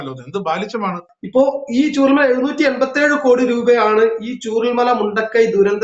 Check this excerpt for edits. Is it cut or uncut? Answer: cut